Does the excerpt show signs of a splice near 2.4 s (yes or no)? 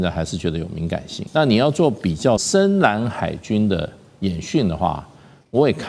yes